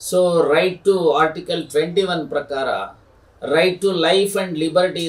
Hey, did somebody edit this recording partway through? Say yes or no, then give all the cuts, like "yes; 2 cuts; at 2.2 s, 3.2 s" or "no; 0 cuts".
no; 0 cuts